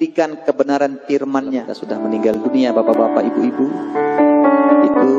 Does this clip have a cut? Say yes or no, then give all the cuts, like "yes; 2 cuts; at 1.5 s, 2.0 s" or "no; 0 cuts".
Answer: yes; 1 cut; at 1.8 s